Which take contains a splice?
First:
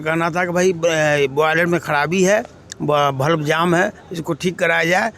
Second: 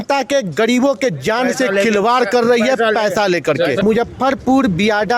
second; 1 cut; at 3.8 s

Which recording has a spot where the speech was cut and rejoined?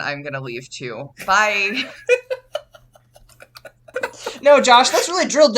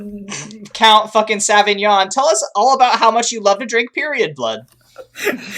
first; 1 cut; at 3.9 s

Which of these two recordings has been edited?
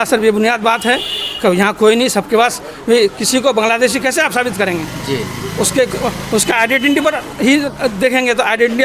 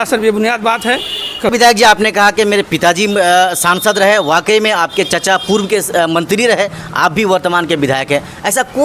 second; 1 cut; at 1.5 s

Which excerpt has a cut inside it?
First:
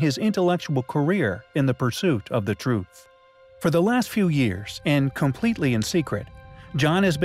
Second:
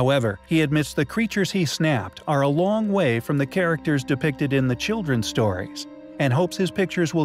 first; 1 cut; at 4.5 s

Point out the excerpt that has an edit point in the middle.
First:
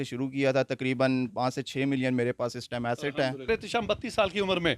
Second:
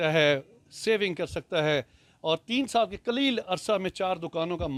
first; 1 cut; at 3.4 s

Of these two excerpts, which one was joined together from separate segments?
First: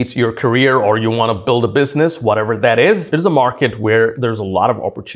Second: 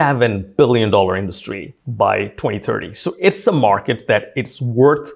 first; 2 cuts; at 3.1 s, 4.2 s

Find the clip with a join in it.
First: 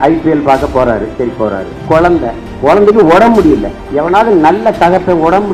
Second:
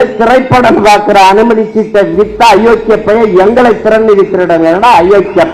first; 3 cuts; at 1.7 s, 2.5 s, 3.8 s

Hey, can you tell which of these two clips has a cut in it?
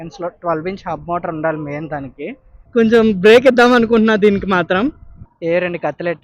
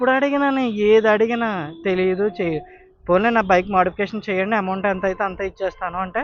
first; 2 cuts; at 2.7 s, 5.1 s

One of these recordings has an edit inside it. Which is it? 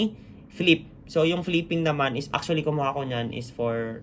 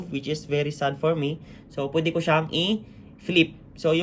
first; 1 cut; at 2.2 s

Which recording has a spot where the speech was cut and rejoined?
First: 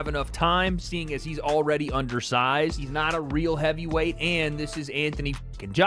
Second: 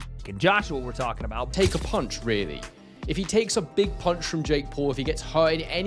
second; 1 cut; at 1.5 s

